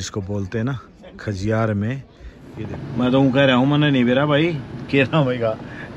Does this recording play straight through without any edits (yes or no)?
no